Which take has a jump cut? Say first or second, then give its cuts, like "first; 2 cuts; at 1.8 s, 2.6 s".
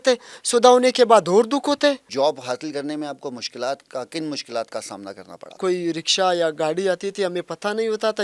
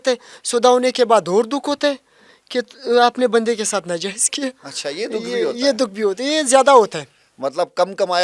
first; 2 cuts; at 2.1 s, 5.6 s